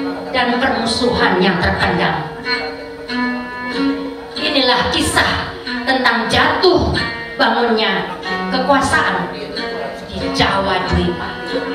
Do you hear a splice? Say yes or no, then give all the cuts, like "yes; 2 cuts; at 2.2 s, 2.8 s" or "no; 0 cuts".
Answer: no; 0 cuts